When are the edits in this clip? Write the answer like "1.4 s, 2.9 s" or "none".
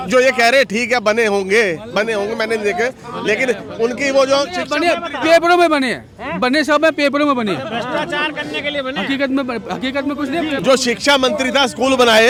none